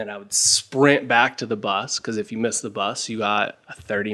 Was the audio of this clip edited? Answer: no; 0 cuts

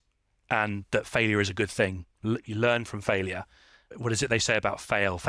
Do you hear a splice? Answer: no; 0 cuts

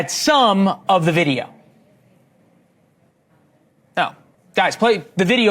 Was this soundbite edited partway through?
yes; 1 cut; at 4.3 s

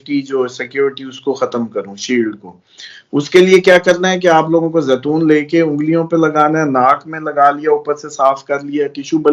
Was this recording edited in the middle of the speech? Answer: no; 0 cuts

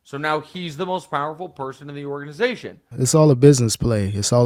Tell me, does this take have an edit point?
no; 0 cuts

